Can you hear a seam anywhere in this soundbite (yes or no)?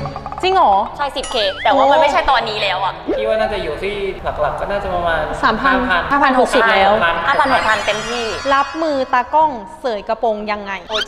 no